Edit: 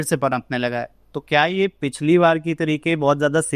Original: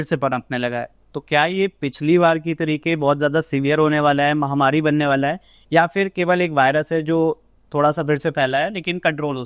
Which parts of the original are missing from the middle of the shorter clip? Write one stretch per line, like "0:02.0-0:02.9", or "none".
none